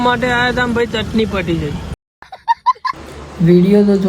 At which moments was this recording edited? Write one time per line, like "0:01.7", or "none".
0:03.1

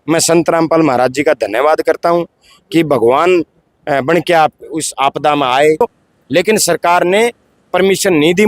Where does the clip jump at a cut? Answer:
0:05.8

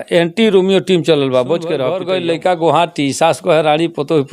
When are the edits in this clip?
0:01.9

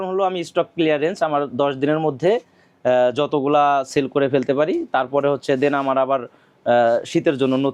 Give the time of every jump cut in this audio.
none

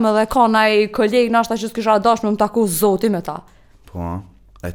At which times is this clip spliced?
none

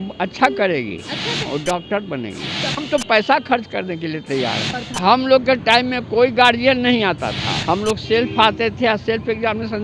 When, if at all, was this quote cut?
0:01.5
0:02.8
0:04.8
0:07.5

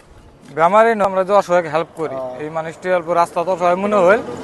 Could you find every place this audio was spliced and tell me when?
0:01.1

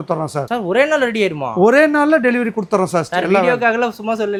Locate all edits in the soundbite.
none

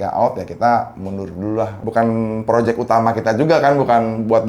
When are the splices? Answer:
0:01.8

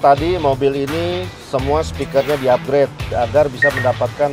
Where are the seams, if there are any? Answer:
0:03.1

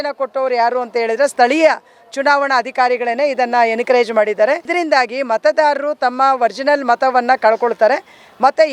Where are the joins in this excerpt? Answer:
0:04.7

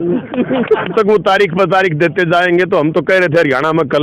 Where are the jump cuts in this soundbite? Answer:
0:00.9

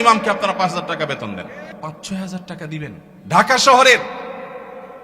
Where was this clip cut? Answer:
0:01.7
0:03.1

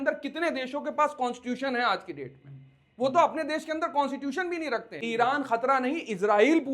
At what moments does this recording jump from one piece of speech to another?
0:04.9

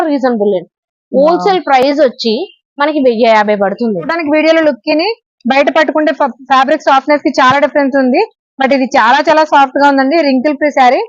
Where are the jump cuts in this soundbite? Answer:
0:04.2

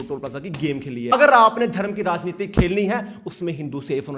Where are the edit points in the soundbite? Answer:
0:01.1

